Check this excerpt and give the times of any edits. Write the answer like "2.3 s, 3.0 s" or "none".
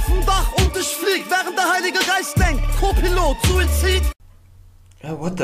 4.0 s